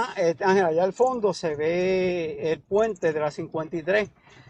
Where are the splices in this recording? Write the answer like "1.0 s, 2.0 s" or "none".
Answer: none